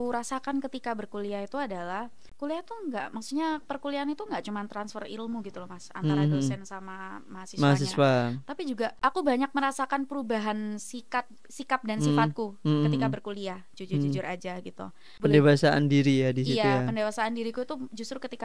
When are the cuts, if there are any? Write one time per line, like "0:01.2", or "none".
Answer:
0:02.2
0:09.0
0:15.1